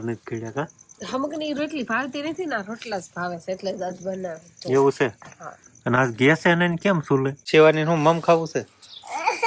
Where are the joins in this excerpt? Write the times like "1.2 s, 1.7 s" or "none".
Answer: 7.4 s